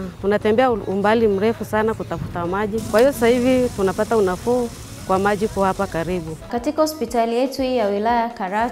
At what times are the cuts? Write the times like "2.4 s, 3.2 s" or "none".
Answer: 2.9 s, 6.5 s